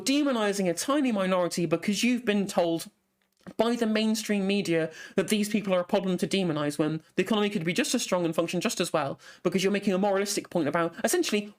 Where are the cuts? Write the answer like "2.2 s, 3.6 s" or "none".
none